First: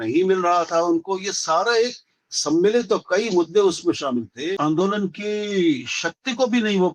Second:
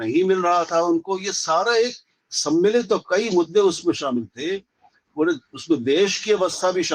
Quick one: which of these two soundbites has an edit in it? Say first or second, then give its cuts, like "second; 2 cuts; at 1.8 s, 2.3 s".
first; 1 cut; at 4.6 s